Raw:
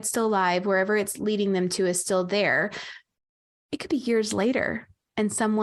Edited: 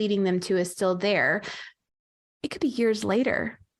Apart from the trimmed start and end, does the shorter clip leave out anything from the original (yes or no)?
no